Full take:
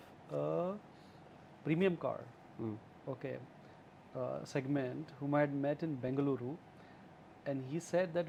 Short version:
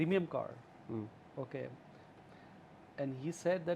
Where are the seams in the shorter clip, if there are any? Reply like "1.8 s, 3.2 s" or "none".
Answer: 2.2 s